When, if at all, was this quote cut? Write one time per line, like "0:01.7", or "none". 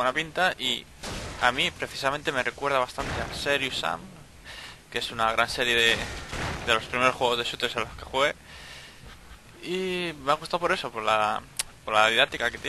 none